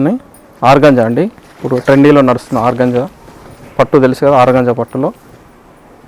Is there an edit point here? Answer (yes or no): no